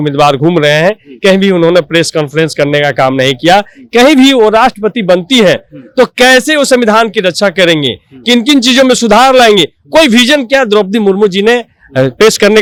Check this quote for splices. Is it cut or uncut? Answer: uncut